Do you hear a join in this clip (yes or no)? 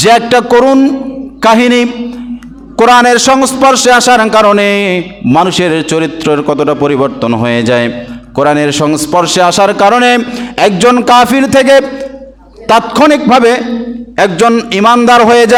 no